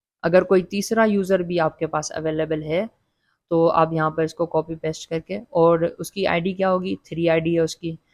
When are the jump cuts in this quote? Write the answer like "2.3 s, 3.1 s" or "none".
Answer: none